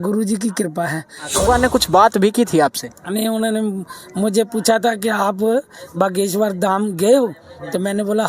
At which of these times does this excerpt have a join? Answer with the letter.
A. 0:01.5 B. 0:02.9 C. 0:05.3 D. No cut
A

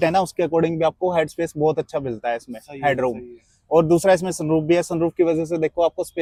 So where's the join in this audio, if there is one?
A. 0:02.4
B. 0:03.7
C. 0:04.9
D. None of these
D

